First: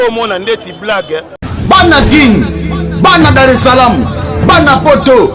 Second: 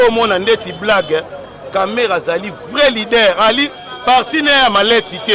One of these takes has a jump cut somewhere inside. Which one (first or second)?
first